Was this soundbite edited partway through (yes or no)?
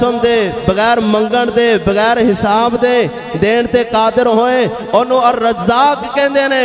no